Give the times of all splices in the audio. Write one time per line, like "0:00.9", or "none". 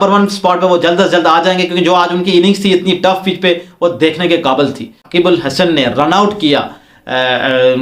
0:05.1